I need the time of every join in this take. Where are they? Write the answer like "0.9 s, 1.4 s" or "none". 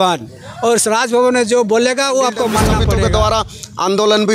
2.8 s